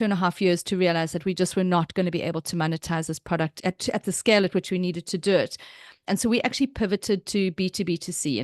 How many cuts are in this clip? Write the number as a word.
one